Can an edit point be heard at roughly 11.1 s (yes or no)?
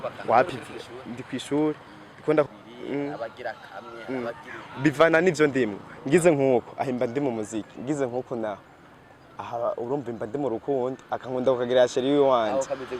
no